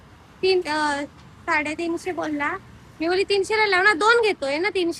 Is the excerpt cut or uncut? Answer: uncut